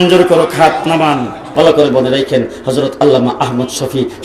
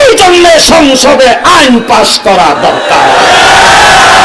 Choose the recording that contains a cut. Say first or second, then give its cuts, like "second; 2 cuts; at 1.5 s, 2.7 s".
first; 1 cut; at 1.5 s